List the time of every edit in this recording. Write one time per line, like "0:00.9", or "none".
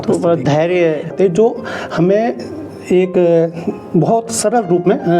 0:01.1